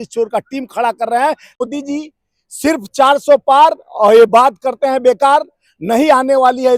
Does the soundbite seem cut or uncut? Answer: cut